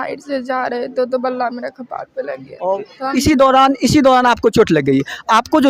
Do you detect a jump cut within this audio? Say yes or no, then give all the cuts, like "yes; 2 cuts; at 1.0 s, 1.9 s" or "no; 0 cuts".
yes; 1 cut; at 2.9 s